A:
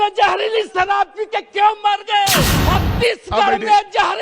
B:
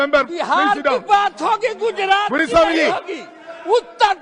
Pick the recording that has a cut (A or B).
A